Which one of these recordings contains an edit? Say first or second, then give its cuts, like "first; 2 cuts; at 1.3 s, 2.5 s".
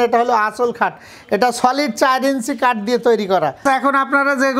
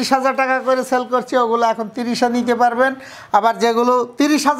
first; 1 cut; at 3.6 s